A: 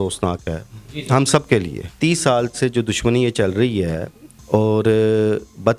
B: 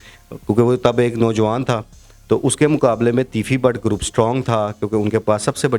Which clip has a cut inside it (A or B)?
A